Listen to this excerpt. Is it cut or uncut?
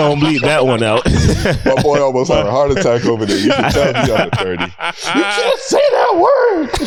uncut